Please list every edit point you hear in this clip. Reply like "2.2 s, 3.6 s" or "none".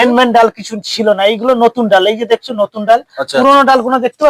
none